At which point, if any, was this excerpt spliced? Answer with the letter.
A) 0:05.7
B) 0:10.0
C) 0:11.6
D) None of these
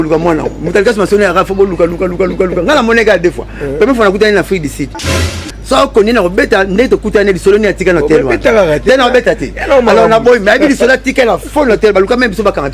D